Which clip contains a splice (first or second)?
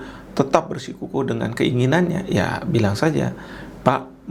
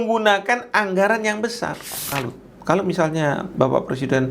second